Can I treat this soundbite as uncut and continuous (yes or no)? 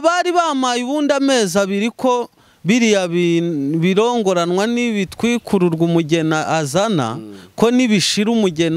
yes